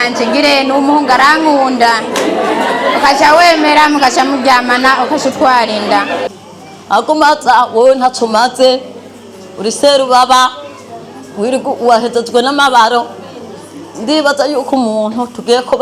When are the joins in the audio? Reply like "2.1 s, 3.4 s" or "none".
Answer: 6.3 s